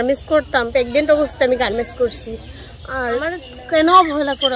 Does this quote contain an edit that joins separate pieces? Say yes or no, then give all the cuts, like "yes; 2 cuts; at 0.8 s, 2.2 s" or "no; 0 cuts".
yes; 1 cut; at 3.3 s